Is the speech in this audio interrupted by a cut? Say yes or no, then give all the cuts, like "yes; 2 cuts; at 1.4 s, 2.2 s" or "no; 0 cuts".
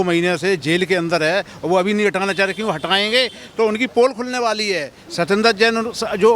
no; 0 cuts